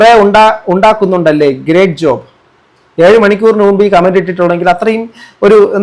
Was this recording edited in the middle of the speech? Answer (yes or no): no